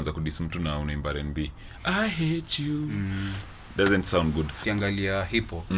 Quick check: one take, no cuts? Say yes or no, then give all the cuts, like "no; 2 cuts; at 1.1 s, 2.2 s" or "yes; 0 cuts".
no; 1 cut; at 4.6 s